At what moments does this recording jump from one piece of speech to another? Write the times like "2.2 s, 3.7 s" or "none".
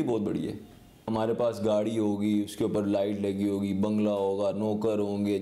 1.1 s